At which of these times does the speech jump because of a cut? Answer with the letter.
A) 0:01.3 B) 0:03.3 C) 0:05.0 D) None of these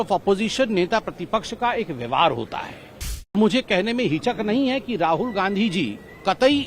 B